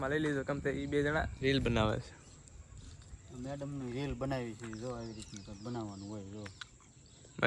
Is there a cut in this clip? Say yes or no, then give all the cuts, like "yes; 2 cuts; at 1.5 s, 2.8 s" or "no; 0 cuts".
no; 0 cuts